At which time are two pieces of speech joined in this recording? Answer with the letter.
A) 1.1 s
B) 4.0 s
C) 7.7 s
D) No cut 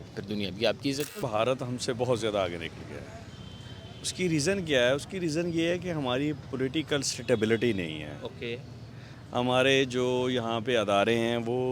A